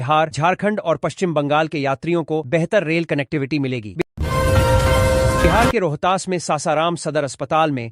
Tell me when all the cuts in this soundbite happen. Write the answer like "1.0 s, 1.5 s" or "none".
4.0 s, 5.5 s